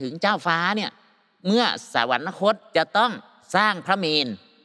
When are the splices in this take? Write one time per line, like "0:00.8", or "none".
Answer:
0:02.6
0:03.3